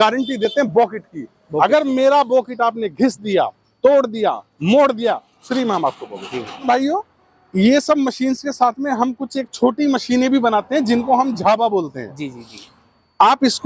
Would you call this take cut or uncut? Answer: cut